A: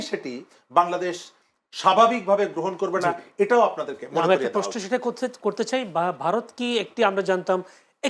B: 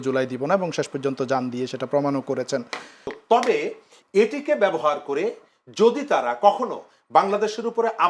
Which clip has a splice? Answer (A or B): B